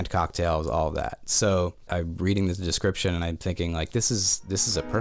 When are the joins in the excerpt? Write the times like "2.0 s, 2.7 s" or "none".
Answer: 1.9 s